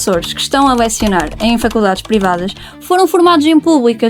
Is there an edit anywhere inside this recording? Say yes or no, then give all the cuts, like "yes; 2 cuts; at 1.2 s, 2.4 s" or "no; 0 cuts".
no; 0 cuts